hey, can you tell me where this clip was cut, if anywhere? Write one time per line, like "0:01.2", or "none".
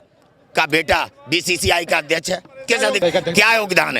0:03.0